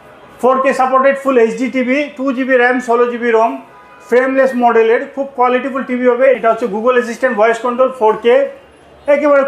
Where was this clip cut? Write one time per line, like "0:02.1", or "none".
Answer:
0:06.4